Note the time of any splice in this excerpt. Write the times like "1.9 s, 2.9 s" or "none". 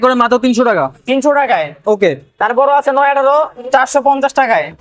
none